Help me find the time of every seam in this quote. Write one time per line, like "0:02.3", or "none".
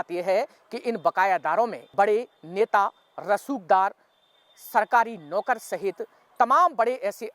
0:01.8